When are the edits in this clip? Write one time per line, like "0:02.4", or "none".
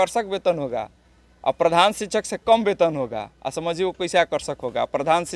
none